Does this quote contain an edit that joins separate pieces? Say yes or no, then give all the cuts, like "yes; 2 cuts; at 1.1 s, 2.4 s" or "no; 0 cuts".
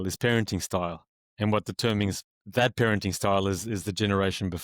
no; 0 cuts